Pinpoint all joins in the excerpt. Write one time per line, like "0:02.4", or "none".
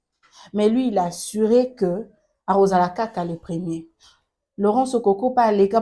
none